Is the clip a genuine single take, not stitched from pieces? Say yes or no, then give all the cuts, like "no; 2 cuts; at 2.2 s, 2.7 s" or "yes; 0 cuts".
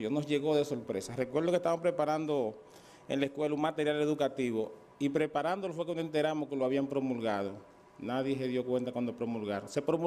yes; 0 cuts